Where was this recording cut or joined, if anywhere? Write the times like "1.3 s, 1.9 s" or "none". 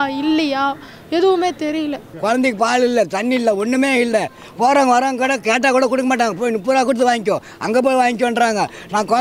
2.1 s